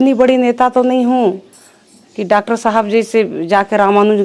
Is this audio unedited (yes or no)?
yes